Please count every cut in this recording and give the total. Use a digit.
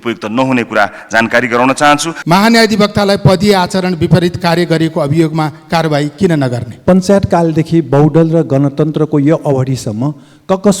2